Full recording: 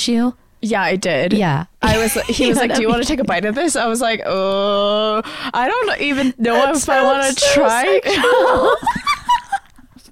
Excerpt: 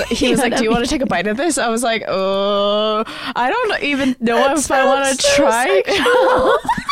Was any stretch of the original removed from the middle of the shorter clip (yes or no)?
no